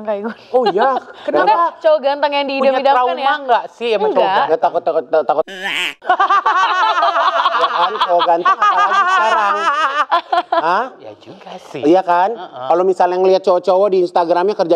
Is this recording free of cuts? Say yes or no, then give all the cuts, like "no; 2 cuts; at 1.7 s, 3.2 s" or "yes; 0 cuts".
yes; 0 cuts